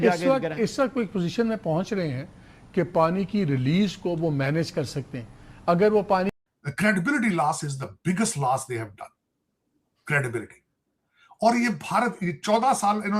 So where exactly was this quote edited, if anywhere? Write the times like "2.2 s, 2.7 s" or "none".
6.3 s